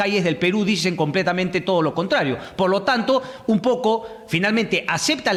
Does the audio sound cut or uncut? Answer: uncut